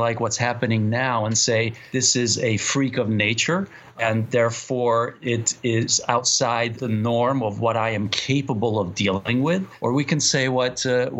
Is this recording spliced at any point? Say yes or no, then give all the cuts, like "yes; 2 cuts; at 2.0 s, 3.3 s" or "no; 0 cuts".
yes; 3 cuts; at 3.9 s, 6.8 s, 9.4 s